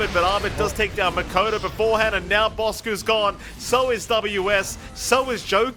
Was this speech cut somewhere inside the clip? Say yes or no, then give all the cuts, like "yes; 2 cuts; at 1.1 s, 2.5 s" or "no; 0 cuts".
no; 0 cuts